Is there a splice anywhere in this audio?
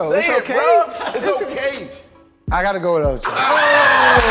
no; 0 cuts

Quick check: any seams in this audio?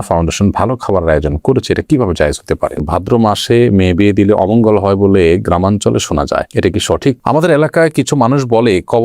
yes; 2 cuts; at 2.8 s, 7.2 s

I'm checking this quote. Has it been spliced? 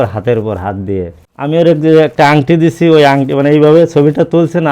yes; 1 cut; at 1.2 s

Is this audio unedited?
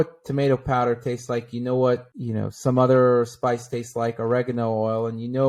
yes; 0 cuts

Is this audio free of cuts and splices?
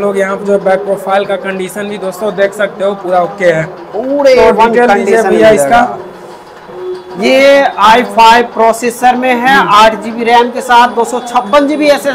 yes; 0 cuts

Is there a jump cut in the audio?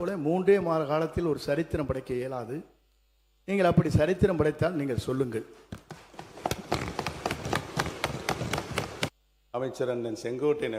yes; 1 cut; at 9.2 s

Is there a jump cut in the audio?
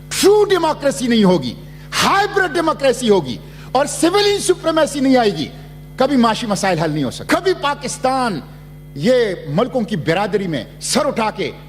yes; 1 cut; at 7.2 s

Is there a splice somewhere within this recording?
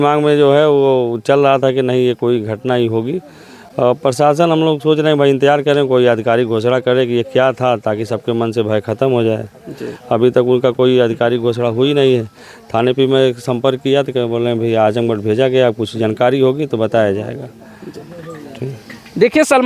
no; 0 cuts

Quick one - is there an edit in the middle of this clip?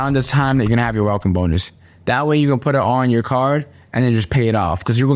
no; 0 cuts

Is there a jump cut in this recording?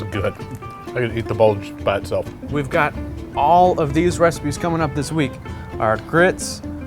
yes; 1 cut; at 2.4 s

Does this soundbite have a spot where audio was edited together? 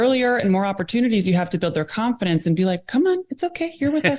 no; 0 cuts

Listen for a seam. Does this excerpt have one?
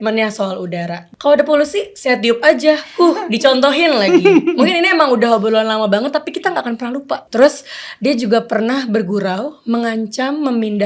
yes; 2 cuts; at 1.0 s, 7.2 s

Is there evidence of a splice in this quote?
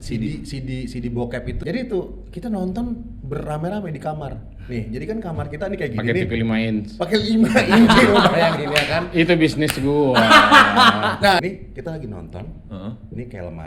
yes; 2 cuts; at 1.6 s, 11.4 s

